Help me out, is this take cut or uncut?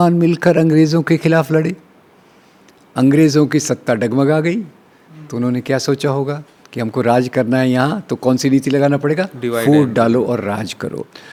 uncut